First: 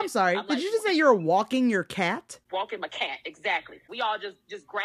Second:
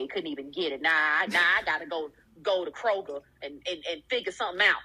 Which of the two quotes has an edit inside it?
first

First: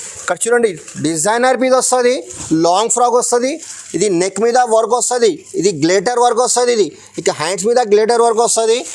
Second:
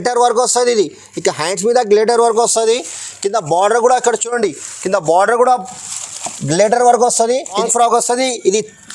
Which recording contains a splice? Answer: second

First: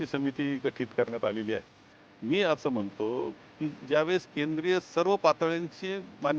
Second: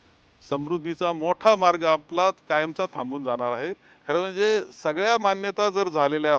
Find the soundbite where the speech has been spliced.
second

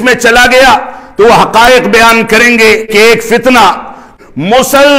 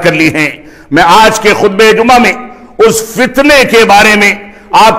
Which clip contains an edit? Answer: first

